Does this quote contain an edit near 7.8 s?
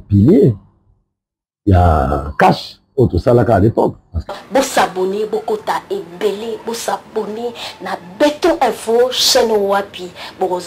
no; 1 cut; at 4.1 s

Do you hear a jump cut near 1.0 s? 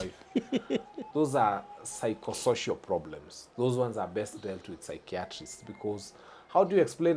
yes; 1 cut; at 1.0 s

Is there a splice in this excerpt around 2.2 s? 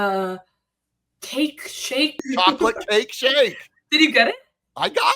yes; 1 cut; at 2.2 s

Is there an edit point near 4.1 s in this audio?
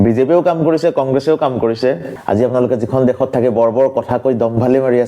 no; 1 cut; at 2.1 s

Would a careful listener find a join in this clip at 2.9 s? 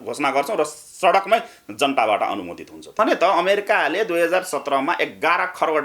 yes; 1 cut; at 2.9 s

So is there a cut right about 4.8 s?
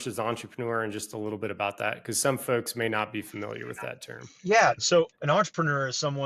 yes; 1 cut; at 4.8 s

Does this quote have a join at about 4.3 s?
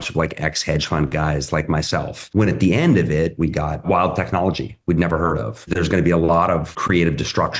no; 3 cuts; at 2.2 s, 5.7 s, 6.7 s

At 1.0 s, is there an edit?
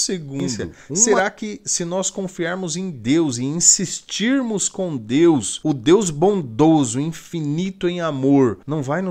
yes; 1 cut; at 1.0 s

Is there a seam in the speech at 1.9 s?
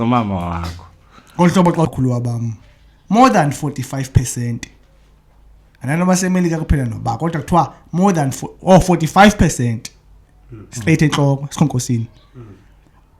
yes; 1 cut; at 1.9 s

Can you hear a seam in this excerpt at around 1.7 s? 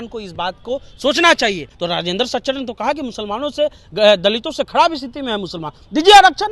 yes; 1 cut; at 1.7 s

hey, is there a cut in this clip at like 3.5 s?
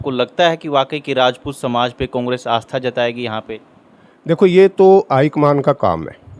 no; 0 cuts

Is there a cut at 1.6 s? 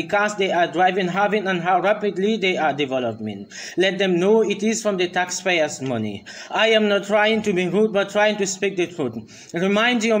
yes; 1 cut; at 1.6 s

